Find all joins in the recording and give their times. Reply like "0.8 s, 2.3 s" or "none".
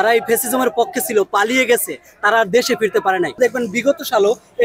3.4 s

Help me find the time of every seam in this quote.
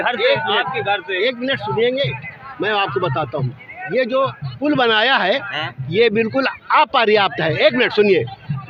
none

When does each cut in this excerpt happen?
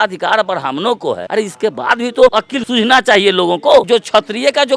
1.2 s, 2.5 s, 3.9 s

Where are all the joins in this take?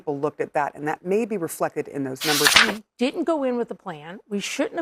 2.6 s

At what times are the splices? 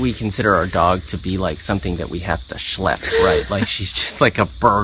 none

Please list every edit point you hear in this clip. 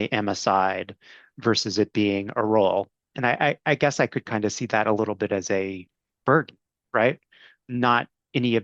1.2 s, 3.5 s, 7.5 s

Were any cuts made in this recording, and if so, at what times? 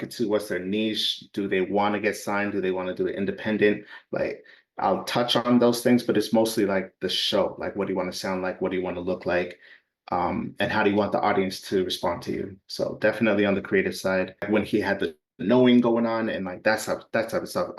14.5 s

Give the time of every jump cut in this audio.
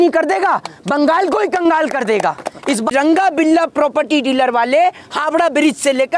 2.9 s

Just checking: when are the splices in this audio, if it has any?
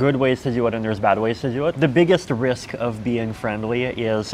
1.7 s

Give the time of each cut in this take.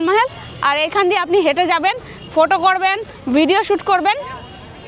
none

